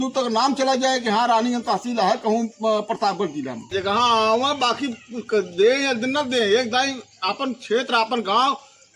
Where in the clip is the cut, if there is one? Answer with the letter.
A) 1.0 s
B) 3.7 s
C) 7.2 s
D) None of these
B